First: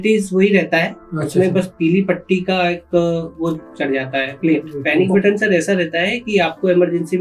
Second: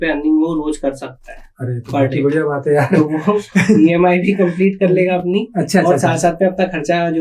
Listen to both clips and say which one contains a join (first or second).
first